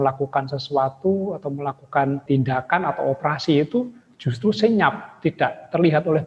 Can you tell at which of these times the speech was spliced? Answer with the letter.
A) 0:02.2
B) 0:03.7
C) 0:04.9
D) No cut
A